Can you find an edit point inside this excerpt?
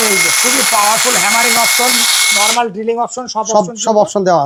no; 0 cuts

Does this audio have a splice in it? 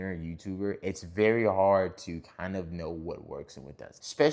no; 0 cuts

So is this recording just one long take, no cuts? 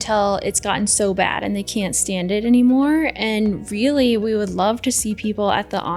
yes; 0 cuts

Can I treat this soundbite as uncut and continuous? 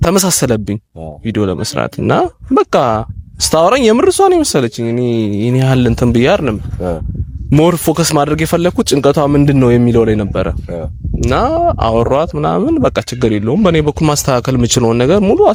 yes; 0 cuts

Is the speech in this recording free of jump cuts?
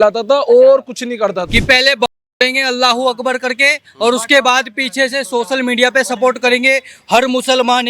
no; 1 cut; at 1.4 s

